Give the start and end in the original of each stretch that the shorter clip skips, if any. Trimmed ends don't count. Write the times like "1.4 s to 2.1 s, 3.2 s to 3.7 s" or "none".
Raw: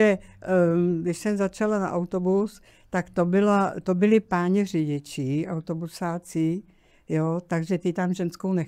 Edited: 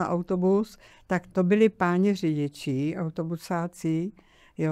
3.1 s to 3.8 s

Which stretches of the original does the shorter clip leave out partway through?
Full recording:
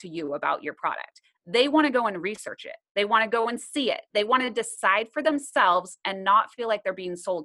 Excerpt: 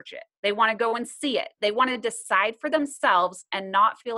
none

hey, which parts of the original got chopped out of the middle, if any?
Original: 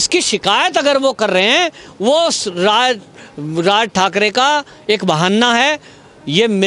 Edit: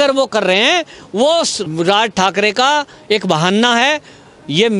2.4 s to 3.4 s

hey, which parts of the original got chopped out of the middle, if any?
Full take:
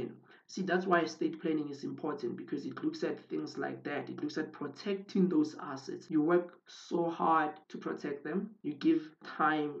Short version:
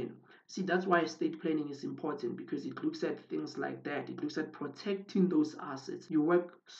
none

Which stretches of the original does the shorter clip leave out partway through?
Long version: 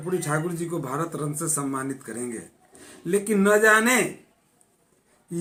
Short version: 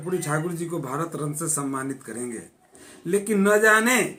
none

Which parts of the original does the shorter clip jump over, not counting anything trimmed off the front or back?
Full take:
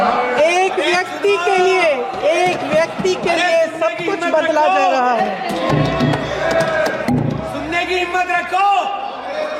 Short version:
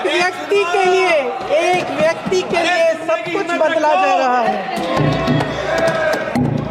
none

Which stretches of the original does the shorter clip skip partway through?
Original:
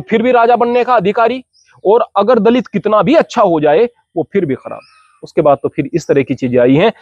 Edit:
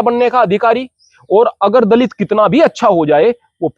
none

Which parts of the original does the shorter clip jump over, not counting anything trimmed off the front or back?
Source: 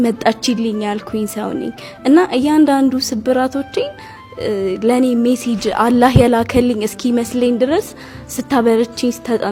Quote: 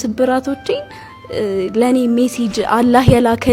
none

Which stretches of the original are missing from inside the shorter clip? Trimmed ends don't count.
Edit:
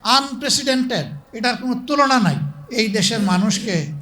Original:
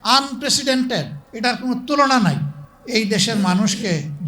2.5 s to 2.7 s

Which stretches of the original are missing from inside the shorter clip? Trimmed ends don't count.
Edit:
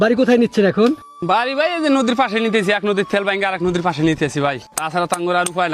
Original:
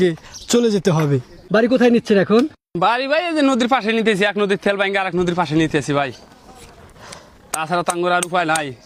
6.2 s to 7.5 s

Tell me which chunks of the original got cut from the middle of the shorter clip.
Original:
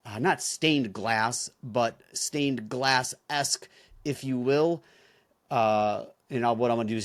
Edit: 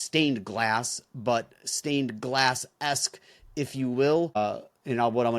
4.8 s to 5.8 s

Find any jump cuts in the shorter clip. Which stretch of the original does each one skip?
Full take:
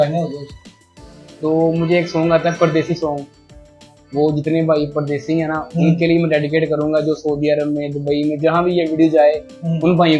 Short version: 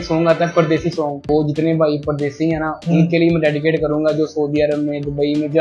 3.2 s to 4.1 s

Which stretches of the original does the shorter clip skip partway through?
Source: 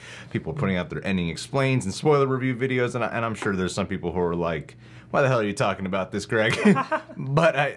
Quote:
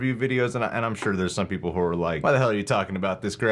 4.6 s to 5.1 s

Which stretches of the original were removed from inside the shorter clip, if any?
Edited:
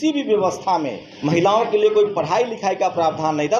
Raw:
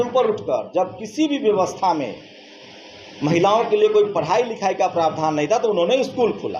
2.2 s to 3.0 s

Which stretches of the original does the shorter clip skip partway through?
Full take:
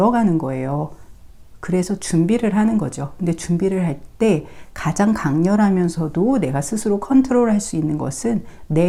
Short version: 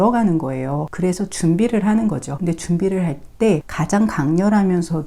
0.9 s to 1.6 s, 3.0 s to 3.1 s, 4.5 s to 4.8 s

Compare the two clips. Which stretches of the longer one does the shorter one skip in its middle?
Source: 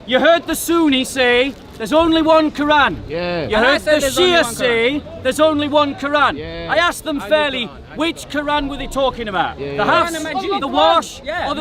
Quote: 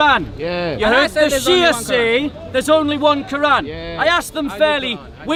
none

